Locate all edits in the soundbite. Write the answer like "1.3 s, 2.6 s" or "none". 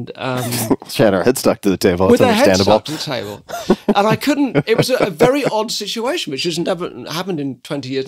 1.2 s

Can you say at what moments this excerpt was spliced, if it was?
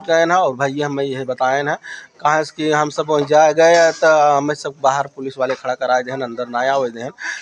none

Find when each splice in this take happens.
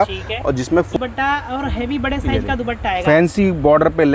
1.0 s

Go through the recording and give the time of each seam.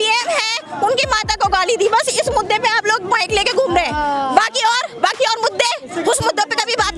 5.9 s

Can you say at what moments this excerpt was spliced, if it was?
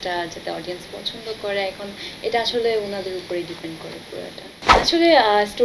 4.7 s

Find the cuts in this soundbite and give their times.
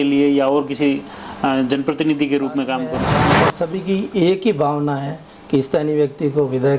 3.2 s

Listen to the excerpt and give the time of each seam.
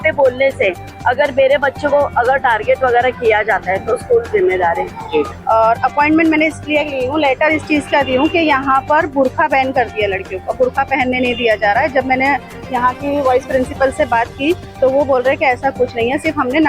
5.4 s

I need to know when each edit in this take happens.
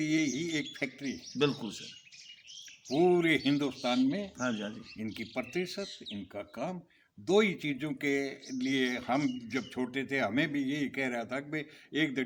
none

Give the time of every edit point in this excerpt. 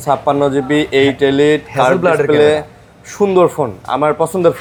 none

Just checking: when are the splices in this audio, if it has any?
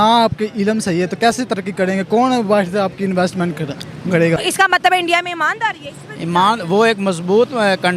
4.4 s

